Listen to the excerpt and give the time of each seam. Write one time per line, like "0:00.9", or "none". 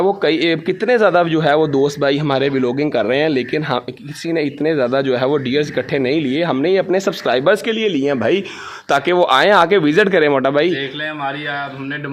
none